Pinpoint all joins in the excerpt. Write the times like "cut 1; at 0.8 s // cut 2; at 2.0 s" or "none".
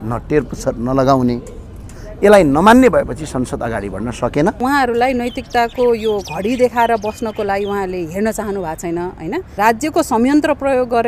cut 1; at 4.6 s // cut 2; at 9.5 s